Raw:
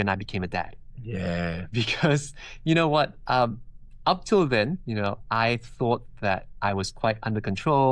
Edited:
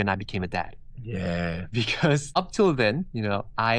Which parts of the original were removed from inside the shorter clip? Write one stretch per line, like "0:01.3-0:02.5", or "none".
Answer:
0:02.3-0:04.0